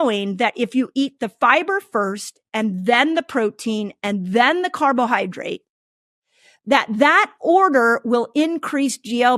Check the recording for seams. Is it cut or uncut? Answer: uncut